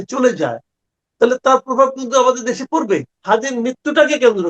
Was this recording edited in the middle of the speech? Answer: yes; 1 cut; at 3.1 s

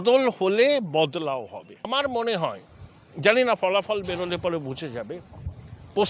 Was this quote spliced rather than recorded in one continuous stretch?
yes; 1 cut; at 1.9 s

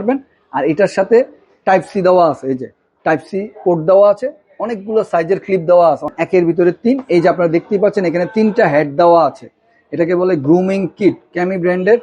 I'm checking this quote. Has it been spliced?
yes; 1 cut; at 6.1 s

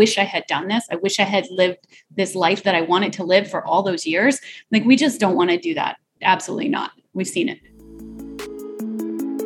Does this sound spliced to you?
yes; 2 cuts; at 6.1 s, 7.7 s

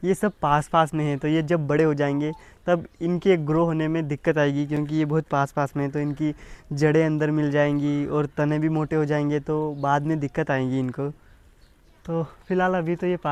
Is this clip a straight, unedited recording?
yes; 0 cuts

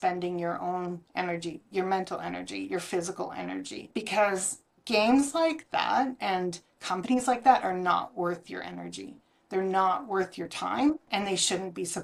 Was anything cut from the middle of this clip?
yes; 2 cuts; at 3.8 s, 11.0 s

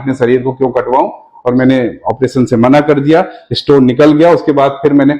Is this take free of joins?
yes; 0 cuts

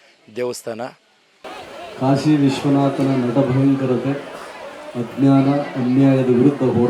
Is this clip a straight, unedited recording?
no; 1 cut; at 1.5 s

